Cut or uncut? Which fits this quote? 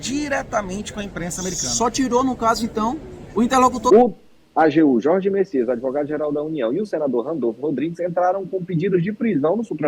cut